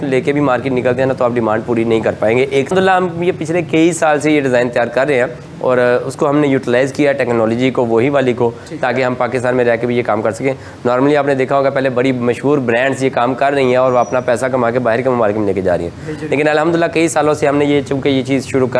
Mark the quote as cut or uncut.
cut